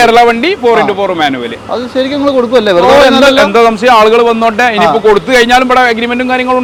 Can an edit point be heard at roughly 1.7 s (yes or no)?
no